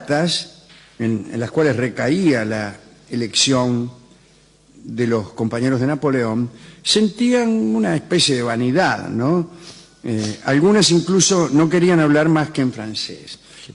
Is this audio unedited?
yes; 0 cuts

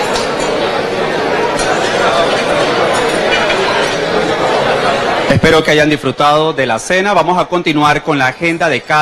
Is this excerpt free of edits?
yes; 0 cuts

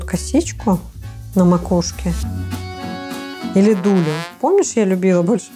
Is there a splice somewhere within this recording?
no; 0 cuts

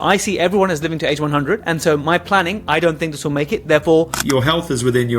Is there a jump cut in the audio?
yes; 1 cut; at 4.1 s

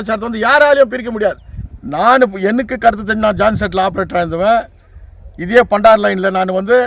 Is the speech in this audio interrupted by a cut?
yes; 1 cut; at 1.7 s

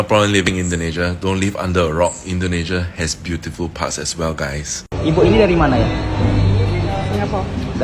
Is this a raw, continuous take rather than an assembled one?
no; 1 cut; at 4.9 s

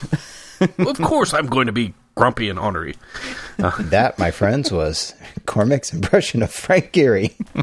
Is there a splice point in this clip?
yes; 1 cut; at 3.9 s

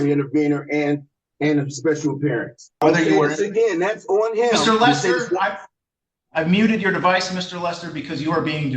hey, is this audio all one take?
no; 1 cut; at 2.8 s

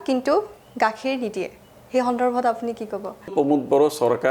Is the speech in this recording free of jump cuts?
no; 1 cut; at 3.3 s

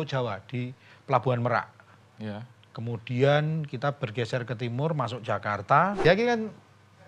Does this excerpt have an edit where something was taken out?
yes; 1 cut; at 6.0 s

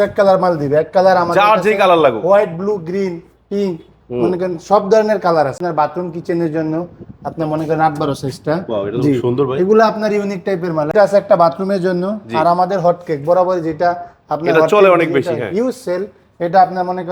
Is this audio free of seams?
no; 2 cuts; at 5.6 s, 10.9 s

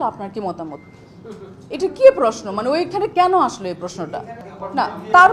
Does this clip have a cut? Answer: no; 0 cuts

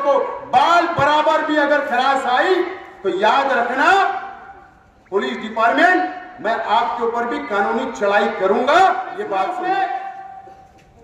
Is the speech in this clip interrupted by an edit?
yes; 1 cut; at 9.4 s

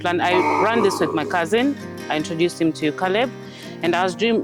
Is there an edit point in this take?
no; 0 cuts

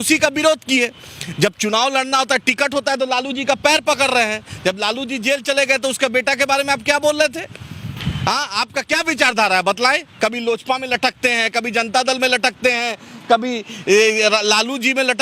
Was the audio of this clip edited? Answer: no; 0 cuts

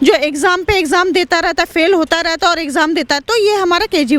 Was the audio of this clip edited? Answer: no; 0 cuts

